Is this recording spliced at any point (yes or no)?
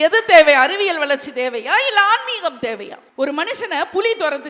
yes